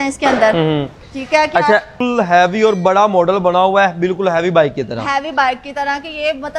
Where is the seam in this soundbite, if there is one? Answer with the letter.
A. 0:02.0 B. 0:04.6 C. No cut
A